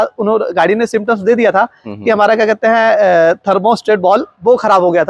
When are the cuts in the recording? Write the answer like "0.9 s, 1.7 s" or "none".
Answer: none